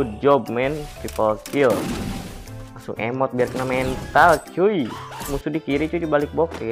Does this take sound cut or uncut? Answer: cut